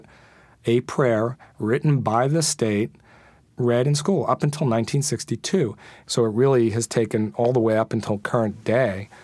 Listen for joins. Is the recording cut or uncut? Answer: cut